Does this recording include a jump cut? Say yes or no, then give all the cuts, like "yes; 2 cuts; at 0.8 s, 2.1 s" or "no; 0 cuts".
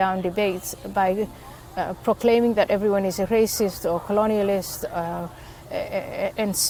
no; 0 cuts